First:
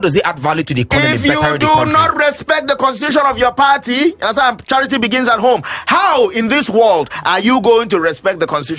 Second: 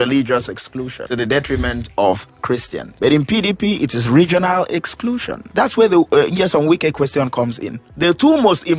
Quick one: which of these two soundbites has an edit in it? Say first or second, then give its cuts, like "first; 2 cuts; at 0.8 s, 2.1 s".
second; 4 cuts; at 1.0 s, 2.8 s, 5.5 s, 7.9 s